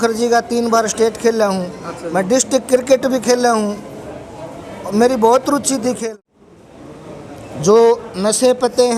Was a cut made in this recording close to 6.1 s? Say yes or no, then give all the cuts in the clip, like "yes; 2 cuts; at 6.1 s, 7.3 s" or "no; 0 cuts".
yes; 1 cut; at 6.1 s